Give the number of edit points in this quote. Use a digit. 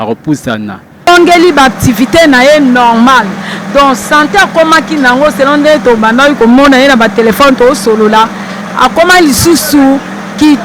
1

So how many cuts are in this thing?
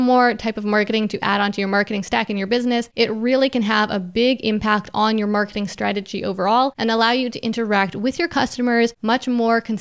3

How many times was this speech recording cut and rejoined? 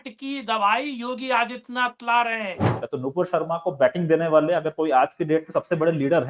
1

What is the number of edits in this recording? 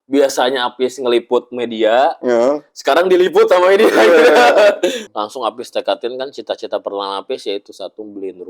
1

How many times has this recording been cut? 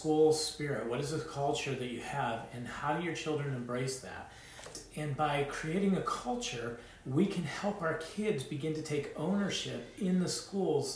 1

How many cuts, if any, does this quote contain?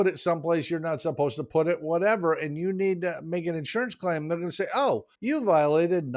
1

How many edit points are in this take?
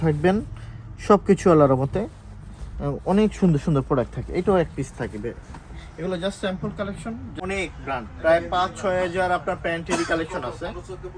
1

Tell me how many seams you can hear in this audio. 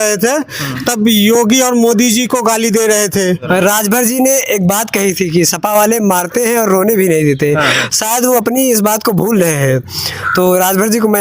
1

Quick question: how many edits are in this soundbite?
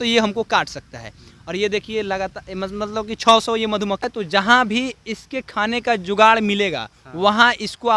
1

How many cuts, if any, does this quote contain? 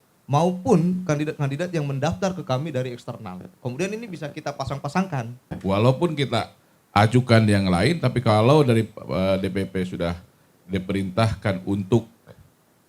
1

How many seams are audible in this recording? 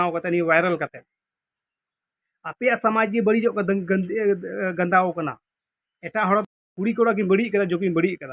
1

